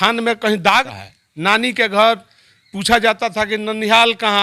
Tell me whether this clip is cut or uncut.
cut